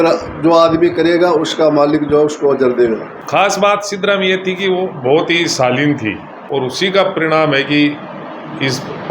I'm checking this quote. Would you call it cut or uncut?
cut